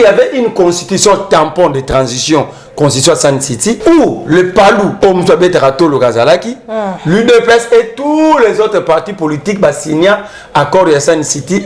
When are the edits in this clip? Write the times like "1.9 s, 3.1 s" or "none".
3.8 s, 4.9 s